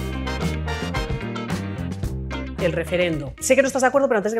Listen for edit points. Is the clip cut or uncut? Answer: cut